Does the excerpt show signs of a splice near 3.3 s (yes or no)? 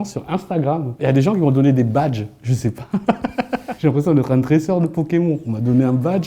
no